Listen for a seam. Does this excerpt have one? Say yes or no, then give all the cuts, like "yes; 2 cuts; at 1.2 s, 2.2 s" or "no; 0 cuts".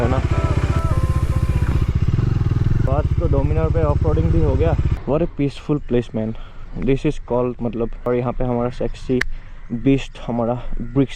yes; 4 cuts; at 0.8 s, 2.9 s, 4.9 s, 8.1 s